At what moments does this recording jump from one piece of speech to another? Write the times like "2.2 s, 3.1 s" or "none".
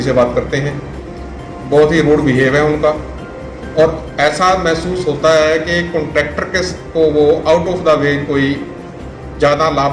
none